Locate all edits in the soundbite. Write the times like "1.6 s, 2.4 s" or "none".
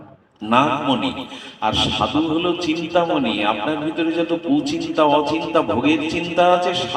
none